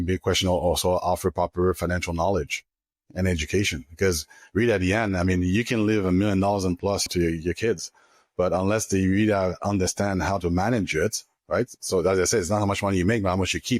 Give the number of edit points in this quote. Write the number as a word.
one